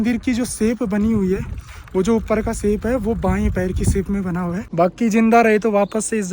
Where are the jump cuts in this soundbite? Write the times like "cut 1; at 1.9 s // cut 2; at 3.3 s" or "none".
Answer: cut 1; at 4.7 s